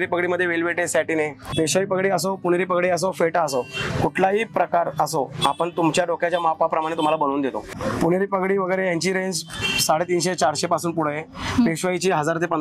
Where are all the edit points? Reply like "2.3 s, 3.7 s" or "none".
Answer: 1.5 s, 7.7 s